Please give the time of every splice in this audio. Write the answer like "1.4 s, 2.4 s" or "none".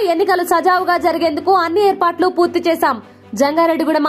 none